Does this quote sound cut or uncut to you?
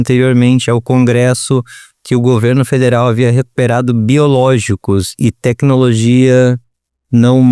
uncut